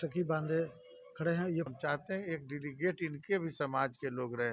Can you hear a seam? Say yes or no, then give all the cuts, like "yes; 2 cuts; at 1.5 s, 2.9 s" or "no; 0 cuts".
yes; 1 cut; at 1.7 s